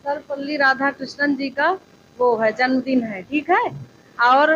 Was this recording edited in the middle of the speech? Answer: no; 0 cuts

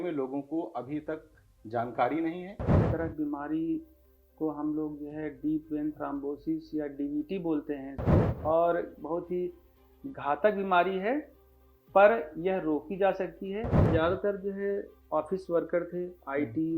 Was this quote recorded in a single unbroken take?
no; 3 cuts; at 2.8 s, 8.3 s, 13.8 s

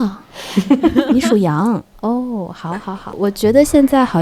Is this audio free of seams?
no; 1 cut; at 3.1 s

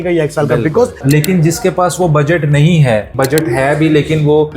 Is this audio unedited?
no; 2 cuts; at 1.0 s, 3.1 s

